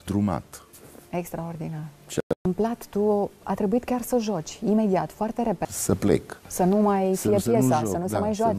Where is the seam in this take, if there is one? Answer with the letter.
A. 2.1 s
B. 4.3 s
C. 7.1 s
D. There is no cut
B